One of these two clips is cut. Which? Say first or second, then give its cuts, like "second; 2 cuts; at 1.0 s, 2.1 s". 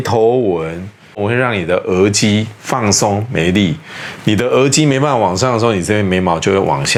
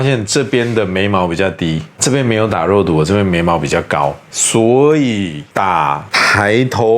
second; 2 cuts; at 4.2 s, 5.8 s